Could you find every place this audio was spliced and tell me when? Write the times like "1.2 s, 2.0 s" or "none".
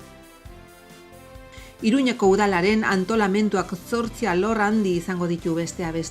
1.4 s